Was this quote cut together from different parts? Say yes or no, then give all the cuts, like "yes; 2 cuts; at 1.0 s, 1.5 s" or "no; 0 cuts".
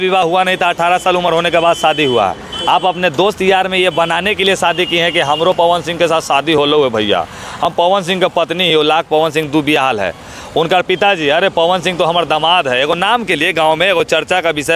no; 0 cuts